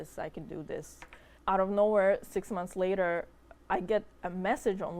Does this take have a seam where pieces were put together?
yes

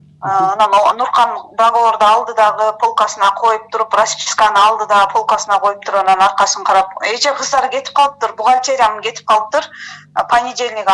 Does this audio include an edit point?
no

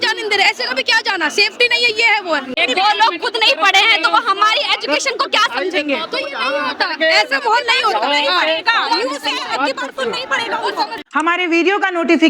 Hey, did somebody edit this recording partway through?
yes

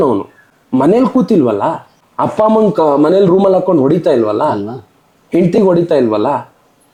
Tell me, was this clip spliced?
no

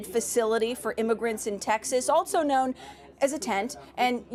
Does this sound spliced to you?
no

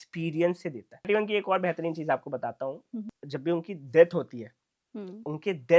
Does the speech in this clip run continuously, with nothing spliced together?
no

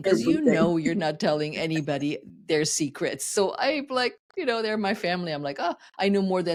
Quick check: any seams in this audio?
no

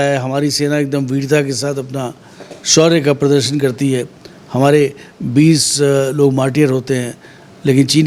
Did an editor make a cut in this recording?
no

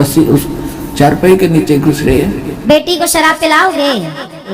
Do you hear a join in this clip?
yes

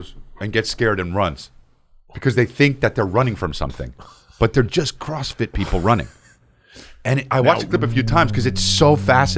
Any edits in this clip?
no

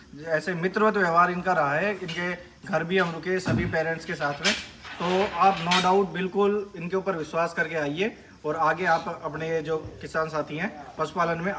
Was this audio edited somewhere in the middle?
no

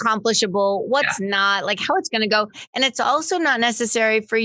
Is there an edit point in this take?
yes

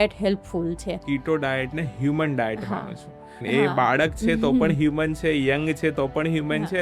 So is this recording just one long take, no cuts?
no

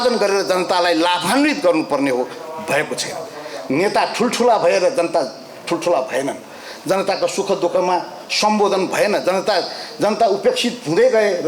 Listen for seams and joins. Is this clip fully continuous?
yes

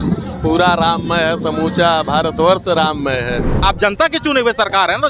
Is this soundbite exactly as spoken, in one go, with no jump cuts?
no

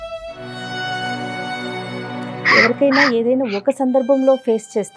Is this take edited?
no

